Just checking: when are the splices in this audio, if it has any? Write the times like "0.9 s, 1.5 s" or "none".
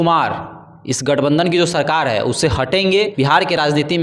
3.1 s